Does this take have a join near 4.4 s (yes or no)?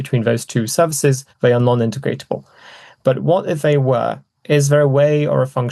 no